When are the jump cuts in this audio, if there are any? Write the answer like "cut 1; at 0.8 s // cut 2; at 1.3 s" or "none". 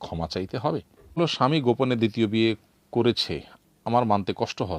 cut 1; at 1.0 s